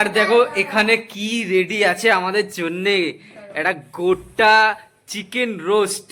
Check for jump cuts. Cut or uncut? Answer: uncut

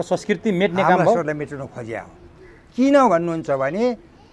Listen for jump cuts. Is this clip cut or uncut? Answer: uncut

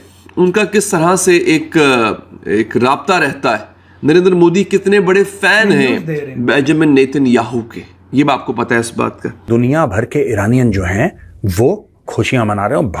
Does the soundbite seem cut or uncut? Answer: cut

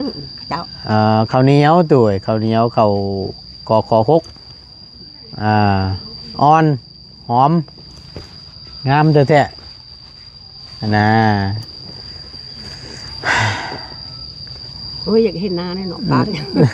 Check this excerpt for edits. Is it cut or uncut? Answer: uncut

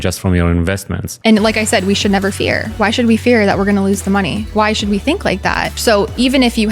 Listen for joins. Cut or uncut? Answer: cut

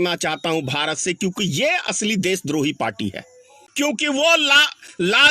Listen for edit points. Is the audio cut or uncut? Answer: cut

